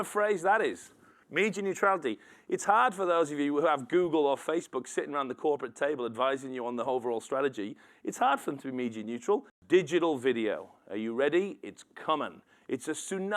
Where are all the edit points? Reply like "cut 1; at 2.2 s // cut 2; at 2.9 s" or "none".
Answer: cut 1; at 9.5 s